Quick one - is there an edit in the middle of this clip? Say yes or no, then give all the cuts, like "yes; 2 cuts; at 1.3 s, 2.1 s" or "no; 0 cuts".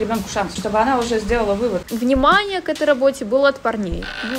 yes; 1 cut; at 1.8 s